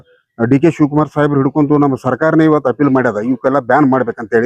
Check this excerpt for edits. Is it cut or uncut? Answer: uncut